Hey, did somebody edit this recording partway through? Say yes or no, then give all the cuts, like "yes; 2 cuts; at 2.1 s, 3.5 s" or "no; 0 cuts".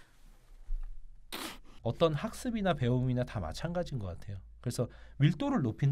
yes; 1 cut; at 1.6 s